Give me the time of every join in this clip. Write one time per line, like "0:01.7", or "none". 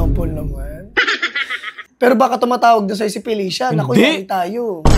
0:01.8